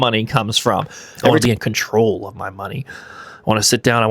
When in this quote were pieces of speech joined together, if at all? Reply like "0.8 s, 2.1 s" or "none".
1.4 s